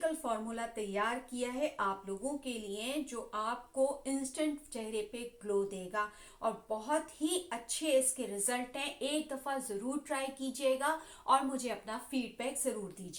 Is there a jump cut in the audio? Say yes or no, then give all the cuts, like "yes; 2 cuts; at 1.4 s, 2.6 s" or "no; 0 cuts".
no; 0 cuts